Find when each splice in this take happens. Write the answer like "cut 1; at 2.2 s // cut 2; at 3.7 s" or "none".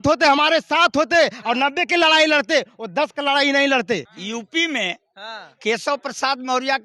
cut 1; at 4.1 s

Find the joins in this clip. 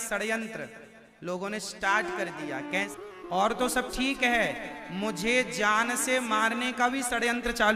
cut 1; at 2.9 s

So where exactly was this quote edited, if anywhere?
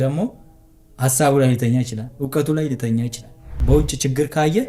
cut 1; at 3.5 s

